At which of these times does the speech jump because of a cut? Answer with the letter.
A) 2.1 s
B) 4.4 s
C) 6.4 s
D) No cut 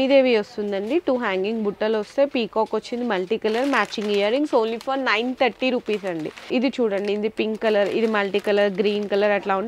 C